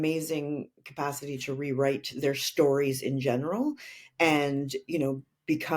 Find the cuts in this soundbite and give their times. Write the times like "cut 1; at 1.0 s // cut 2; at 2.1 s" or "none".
none